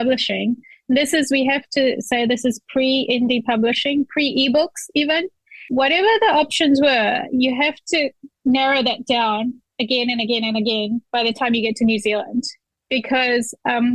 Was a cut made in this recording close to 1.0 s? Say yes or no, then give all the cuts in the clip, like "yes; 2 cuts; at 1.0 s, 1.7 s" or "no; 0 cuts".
no; 2 cuts; at 5.3 s, 8.3 s